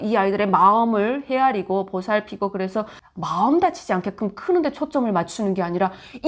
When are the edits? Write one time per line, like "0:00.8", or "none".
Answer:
none